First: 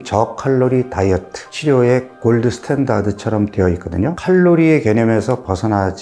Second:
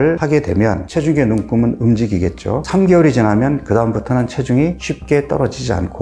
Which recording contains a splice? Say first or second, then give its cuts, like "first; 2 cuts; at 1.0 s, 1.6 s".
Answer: second; 1 cut; at 2.6 s